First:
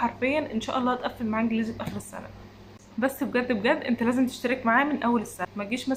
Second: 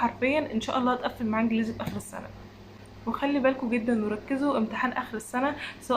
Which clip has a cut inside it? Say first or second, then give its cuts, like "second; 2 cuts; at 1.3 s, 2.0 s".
second; 1 cut; at 2.8 s